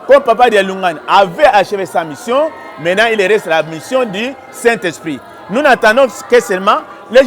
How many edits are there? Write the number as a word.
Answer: zero